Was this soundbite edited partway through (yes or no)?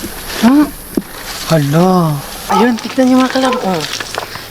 yes